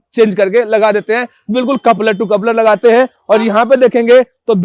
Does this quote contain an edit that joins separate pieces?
no; 0 cuts

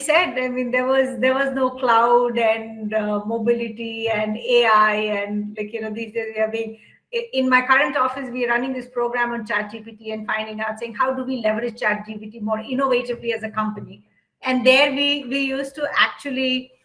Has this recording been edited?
no; 0 cuts

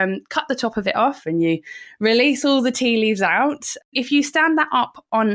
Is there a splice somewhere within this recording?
yes; 1 cut; at 3.9 s

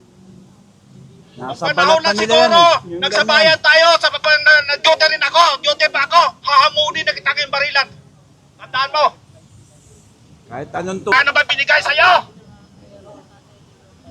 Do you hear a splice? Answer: yes; 1 cut; at 11.1 s

